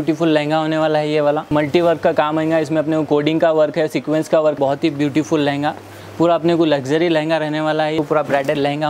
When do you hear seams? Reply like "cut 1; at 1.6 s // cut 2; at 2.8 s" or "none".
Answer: cut 1; at 4.6 s // cut 2; at 8.0 s